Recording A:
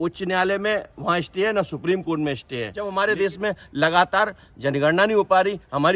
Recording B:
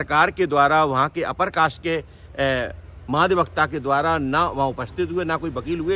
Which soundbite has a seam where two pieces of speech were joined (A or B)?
A